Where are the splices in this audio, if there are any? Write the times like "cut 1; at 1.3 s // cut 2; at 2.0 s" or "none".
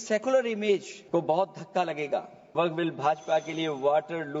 cut 1; at 0.9 s // cut 2; at 2.5 s

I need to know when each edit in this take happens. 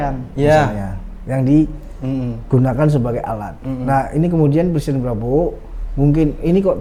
none

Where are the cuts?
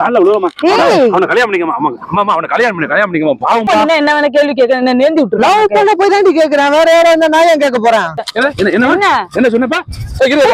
cut 1; at 3.7 s // cut 2; at 8.2 s

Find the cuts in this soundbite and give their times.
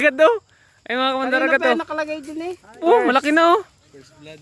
cut 1; at 2.8 s

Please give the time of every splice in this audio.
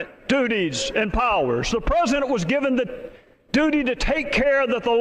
cut 1; at 3.4 s

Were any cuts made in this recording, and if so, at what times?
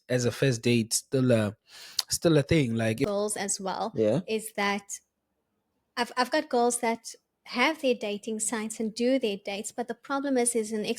cut 1; at 3.1 s

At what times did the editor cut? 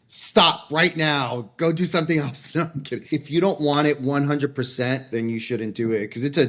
cut 1; at 3.1 s // cut 2; at 5.1 s

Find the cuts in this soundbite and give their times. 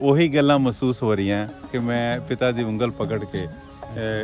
cut 1; at 1.7 s

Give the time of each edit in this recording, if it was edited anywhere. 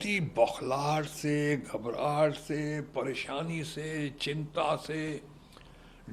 none

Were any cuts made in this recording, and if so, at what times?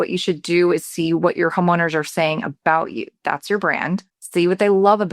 cut 1; at 4.2 s

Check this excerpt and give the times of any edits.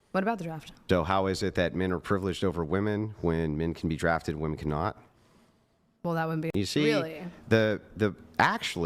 cut 1; at 6.5 s

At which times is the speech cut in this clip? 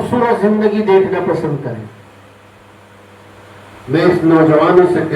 cut 1; at 2.3 s

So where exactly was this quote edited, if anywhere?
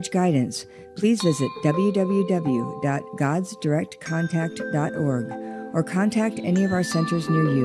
none

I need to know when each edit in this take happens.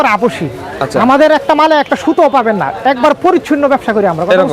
none

